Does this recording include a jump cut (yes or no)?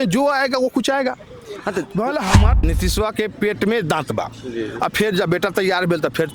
yes